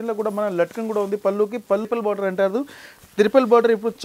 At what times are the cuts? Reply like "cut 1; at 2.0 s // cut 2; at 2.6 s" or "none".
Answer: cut 1; at 1.9 s